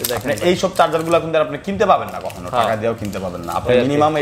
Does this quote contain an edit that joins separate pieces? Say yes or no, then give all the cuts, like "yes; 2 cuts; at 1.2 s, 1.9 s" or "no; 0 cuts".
no; 0 cuts